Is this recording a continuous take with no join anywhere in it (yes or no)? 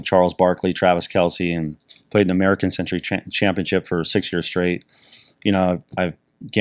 yes